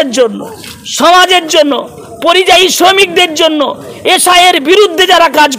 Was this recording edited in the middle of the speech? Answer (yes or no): no